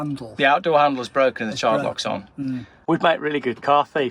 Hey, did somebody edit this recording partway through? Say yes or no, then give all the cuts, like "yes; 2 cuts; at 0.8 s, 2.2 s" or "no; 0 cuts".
yes; 1 cut; at 2.7 s